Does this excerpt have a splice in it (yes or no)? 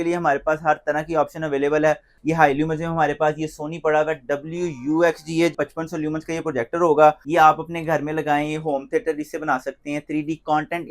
yes